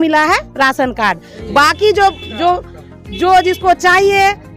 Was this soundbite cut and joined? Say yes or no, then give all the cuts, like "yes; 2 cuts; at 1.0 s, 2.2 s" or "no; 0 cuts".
no; 0 cuts